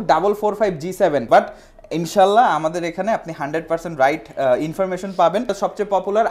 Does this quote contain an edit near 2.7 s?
no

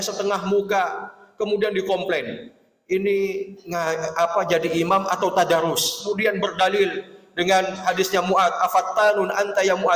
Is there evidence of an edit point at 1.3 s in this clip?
no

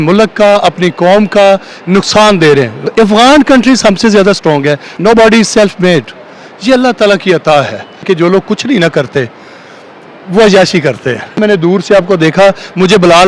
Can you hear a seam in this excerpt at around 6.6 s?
no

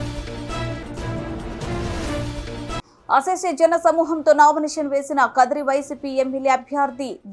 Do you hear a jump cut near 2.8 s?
yes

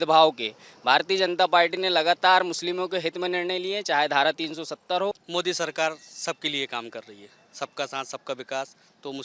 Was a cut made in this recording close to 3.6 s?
no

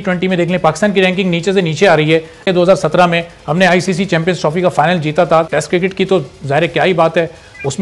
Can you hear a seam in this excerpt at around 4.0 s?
no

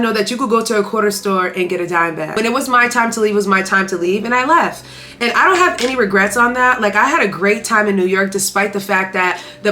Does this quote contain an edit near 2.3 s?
yes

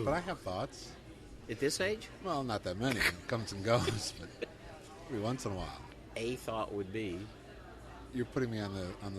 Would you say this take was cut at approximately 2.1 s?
no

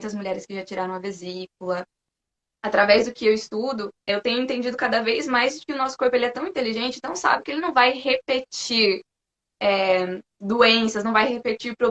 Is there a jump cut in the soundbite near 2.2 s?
yes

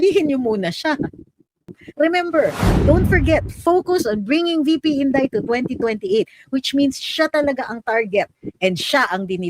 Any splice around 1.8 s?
yes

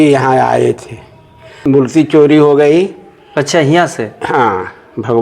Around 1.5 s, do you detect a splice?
yes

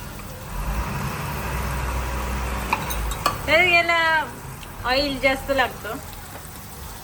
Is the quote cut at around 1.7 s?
no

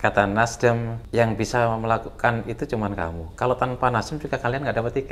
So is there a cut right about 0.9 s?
yes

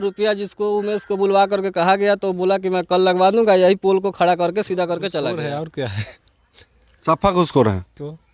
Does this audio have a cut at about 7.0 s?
no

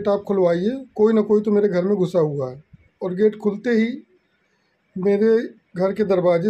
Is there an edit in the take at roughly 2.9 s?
yes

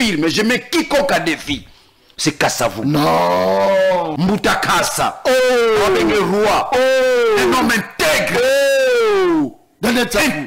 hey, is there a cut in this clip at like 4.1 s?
yes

